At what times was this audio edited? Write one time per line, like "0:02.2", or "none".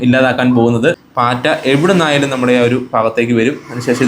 0:01.0